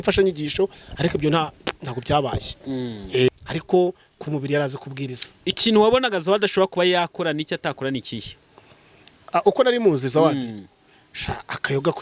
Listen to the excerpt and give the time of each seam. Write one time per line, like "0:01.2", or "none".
0:03.3